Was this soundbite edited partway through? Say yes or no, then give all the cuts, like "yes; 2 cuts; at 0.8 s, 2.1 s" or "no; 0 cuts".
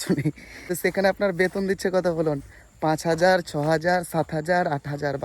no; 0 cuts